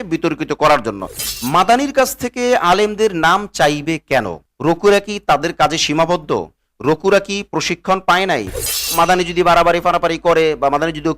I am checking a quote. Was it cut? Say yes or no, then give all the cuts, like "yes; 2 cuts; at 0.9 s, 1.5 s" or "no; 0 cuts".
yes; 2 cuts; at 1.4 s, 8.9 s